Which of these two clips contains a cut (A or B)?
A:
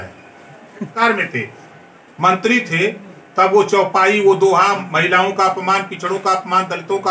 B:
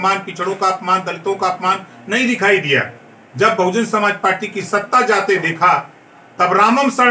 A